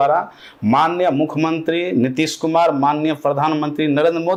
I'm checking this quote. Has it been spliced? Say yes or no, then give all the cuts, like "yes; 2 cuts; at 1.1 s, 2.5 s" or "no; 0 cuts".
no; 0 cuts